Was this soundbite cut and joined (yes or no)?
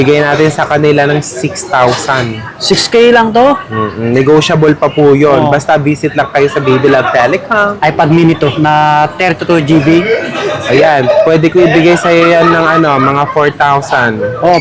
yes